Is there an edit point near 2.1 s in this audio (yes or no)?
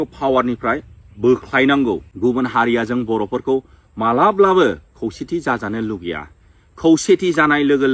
yes